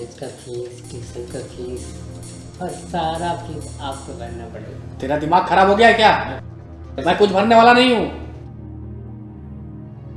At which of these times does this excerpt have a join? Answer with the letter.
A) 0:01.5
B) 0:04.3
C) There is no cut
C